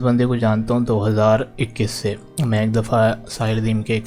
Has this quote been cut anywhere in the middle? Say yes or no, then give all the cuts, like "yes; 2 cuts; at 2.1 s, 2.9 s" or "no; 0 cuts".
no; 0 cuts